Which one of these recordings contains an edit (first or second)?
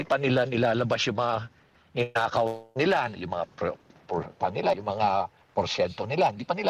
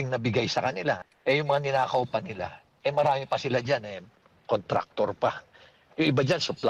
second